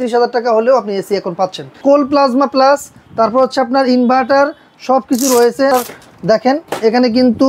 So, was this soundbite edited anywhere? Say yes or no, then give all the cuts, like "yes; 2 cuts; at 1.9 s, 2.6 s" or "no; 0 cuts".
yes; 2 cuts; at 1.8 s, 5.7 s